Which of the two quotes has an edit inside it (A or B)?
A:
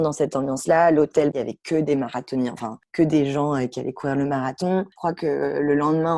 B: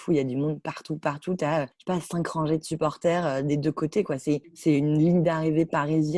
A